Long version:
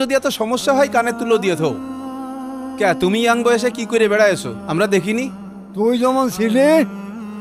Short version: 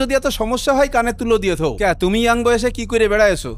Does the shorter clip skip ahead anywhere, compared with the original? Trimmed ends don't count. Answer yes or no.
yes